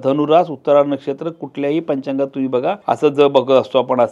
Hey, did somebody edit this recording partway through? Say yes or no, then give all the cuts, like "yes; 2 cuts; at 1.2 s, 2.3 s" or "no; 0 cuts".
yes; 1 cut; at 2.8 s